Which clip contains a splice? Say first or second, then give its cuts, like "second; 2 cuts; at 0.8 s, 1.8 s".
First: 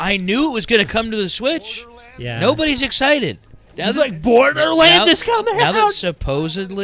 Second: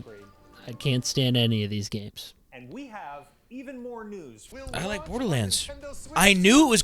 second; 1 cut; at 4.5 s